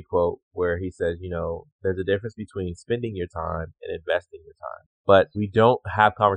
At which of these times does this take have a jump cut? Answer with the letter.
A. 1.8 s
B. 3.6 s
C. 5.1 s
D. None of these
C